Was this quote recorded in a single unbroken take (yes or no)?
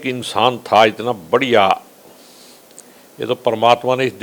yes